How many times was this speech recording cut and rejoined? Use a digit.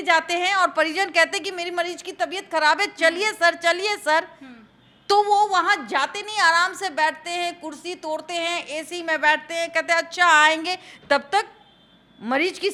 0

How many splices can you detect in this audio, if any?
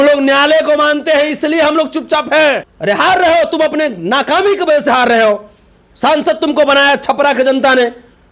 1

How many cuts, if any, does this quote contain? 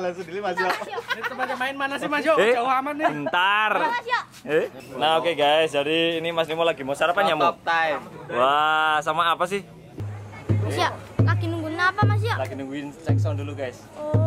2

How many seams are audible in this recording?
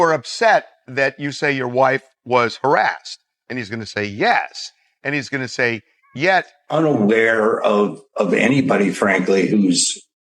1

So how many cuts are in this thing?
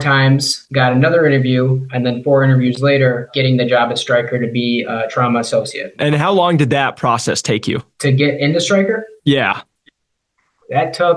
2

